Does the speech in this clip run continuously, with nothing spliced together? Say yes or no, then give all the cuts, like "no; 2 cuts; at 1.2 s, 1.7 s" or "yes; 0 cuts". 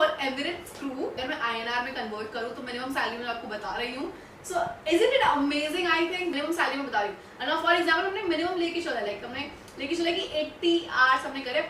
no; 2 cuts; at 1.2 s, 6.3 s